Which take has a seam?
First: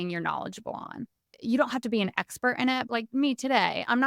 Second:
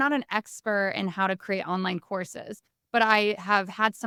first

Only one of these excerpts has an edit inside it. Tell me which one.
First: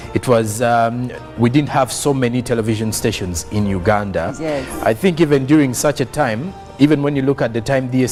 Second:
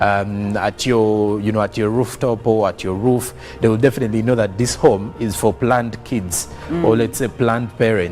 second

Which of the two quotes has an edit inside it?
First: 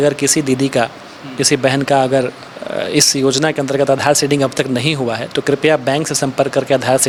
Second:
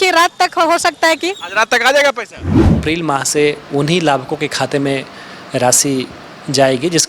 second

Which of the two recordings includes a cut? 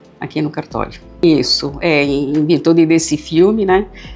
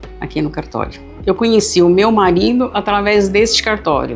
second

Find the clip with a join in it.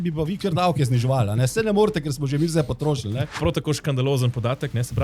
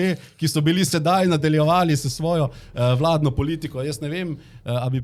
first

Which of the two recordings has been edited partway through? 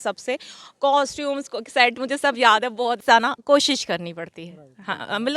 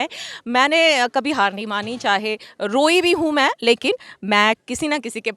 first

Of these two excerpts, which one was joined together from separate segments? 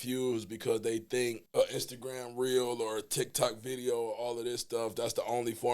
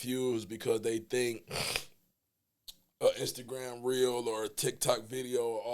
first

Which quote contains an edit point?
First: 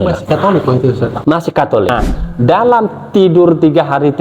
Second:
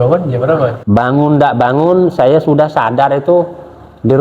first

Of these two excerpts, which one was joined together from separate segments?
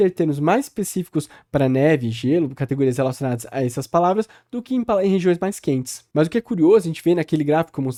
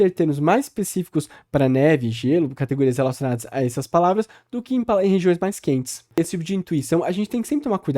second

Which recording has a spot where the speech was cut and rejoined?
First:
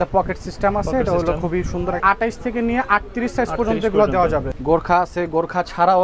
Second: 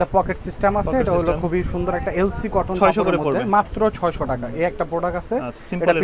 first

